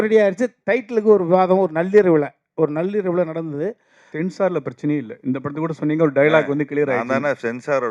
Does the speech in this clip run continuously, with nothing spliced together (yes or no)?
no